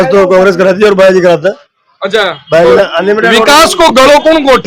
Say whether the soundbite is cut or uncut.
uncut